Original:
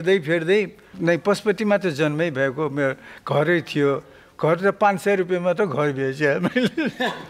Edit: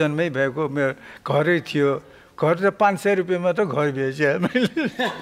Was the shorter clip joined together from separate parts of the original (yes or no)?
no